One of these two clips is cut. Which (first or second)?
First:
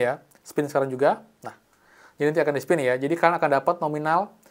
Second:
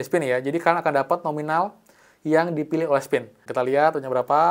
second